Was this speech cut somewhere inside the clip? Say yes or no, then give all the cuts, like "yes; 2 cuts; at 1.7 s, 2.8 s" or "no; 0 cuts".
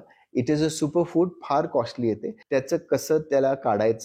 yes; 1 cut; at 2.3 s